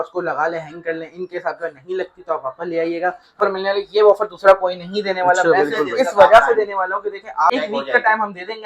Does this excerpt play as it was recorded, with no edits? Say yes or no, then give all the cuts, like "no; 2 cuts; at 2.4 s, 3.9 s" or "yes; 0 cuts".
no; 2 cuts; at 3.4 s, 7.5 s